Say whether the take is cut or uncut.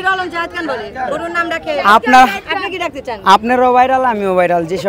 uncut